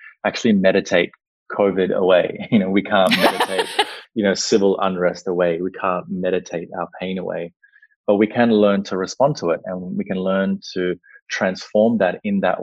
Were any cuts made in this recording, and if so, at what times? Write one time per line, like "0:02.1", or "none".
none

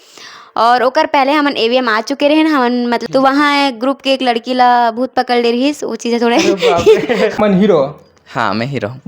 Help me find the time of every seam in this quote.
0:03.0
0:07.3

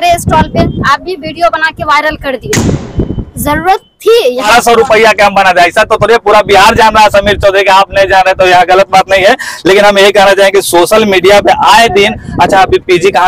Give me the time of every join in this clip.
0:04.5

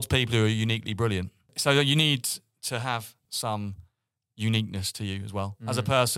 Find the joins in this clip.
0:01.5
0:03.3

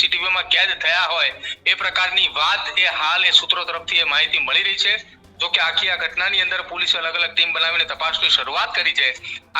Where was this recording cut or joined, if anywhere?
none

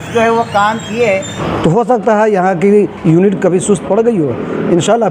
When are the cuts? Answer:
0:01.3

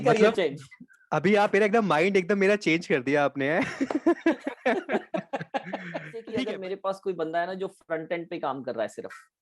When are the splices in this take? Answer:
0:06.3

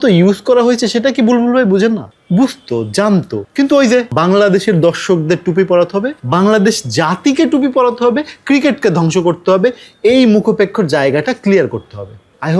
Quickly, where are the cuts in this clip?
none

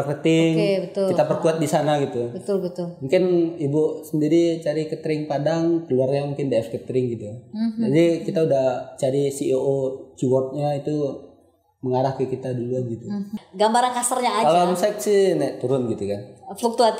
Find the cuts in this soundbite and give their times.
0:13.4

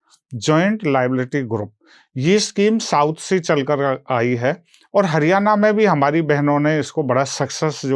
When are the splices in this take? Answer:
none

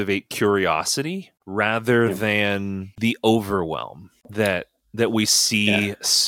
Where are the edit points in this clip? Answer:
none

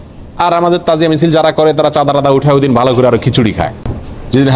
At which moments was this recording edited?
none

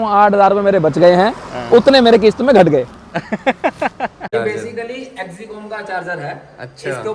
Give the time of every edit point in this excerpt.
0:04.3

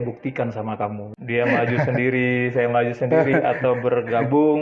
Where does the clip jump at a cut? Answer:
0:01.1

